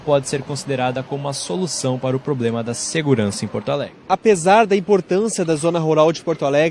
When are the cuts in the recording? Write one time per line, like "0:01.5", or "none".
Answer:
0:03.8